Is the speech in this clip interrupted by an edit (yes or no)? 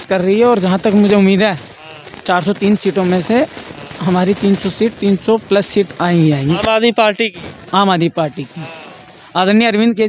no